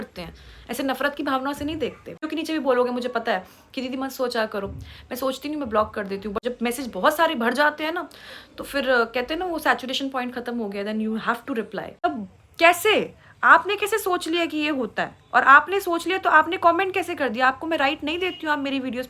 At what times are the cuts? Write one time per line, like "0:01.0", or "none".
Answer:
0:02.3
0:06.4
0:12.1